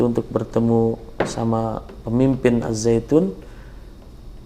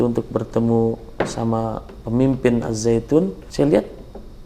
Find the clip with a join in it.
second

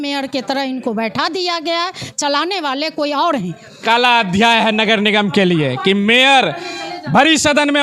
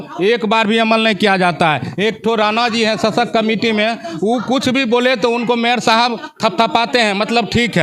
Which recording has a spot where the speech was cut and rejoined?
first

